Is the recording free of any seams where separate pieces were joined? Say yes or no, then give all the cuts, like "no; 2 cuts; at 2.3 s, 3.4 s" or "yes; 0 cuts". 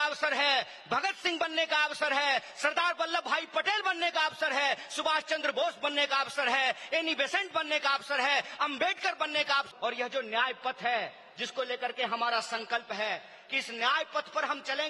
no; 1 cut; at 9.7 s